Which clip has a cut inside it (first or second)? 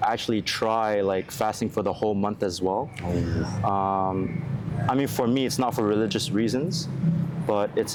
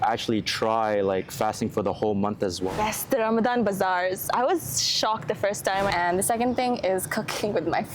second